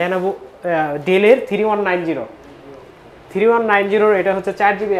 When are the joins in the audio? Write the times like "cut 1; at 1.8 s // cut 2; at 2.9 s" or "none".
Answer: none